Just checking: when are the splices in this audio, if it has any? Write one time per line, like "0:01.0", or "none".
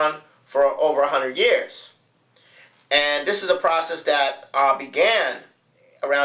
0:02.5